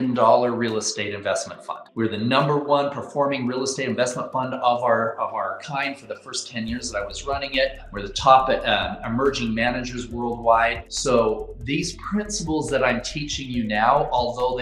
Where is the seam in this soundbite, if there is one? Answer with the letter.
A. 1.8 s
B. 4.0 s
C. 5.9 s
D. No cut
A